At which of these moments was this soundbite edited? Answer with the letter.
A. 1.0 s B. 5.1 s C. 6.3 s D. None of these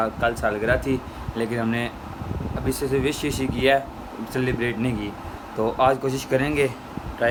D